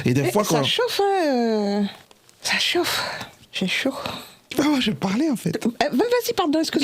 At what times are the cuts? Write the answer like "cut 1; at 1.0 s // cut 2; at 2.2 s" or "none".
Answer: cut 1; at 4.4 s

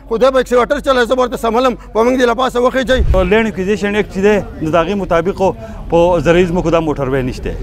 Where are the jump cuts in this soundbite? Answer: cut 1; at 3.1 s

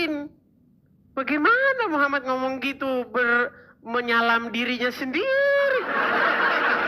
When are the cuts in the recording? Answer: none

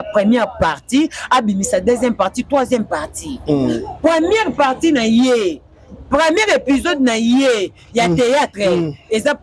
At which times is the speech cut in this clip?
none

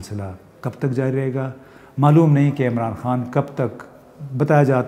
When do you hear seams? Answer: none

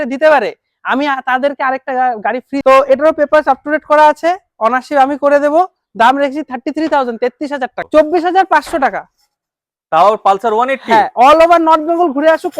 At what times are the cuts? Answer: cut 1; at 2.6 s // cut 2; at 7.8 s

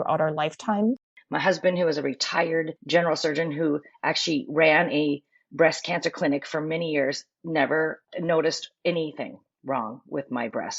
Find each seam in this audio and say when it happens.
cut 1; at 1.0 s // cut 2; at 8.0 s

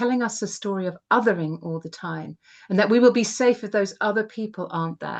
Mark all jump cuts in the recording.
none

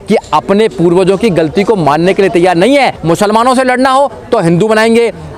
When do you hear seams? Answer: cut 1; at 3.0 s

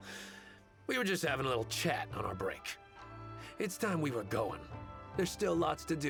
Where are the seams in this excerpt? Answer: none

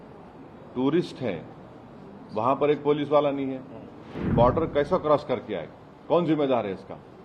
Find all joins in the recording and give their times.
cut 1; at 4.2 s

